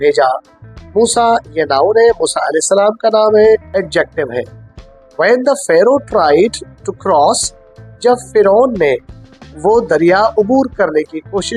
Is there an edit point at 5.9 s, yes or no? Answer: no